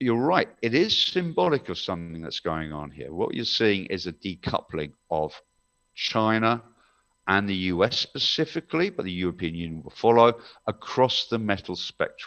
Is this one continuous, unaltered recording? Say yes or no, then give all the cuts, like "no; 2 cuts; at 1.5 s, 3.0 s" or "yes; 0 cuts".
yes; 0 cuts